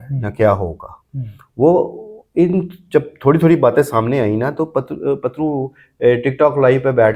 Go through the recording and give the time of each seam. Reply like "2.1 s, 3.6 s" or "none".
none